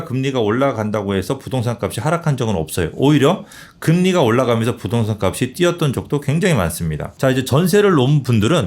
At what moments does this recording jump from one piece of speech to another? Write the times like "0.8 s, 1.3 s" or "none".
7.0 s